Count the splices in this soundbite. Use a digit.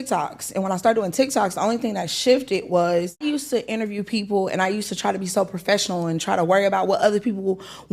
1